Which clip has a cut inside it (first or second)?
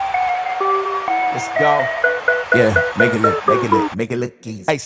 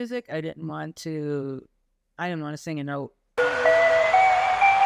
second